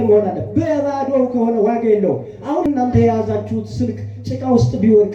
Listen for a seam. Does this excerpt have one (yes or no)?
yes